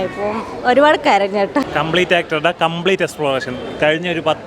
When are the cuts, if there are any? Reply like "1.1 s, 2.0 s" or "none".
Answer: 1.7 s